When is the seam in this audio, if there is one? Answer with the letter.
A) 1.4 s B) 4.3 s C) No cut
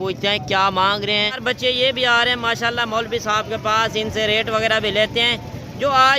A